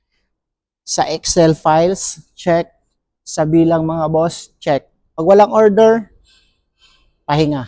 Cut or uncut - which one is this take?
cut